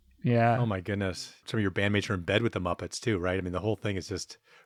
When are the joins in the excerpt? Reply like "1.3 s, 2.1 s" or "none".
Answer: none

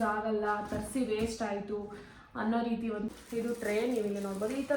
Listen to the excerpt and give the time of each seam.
3.1 s

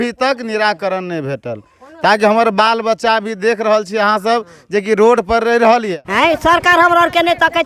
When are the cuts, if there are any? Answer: 6.0 s

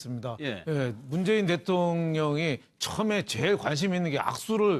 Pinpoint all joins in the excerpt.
3.9 s

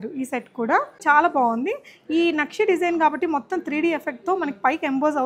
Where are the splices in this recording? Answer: 1.0 s

